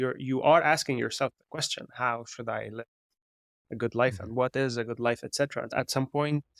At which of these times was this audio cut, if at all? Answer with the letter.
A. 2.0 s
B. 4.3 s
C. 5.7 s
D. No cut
C